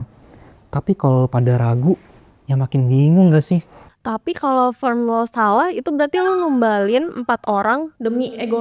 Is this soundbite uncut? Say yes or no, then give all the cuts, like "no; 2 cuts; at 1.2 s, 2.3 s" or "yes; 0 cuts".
yes; 0 cuts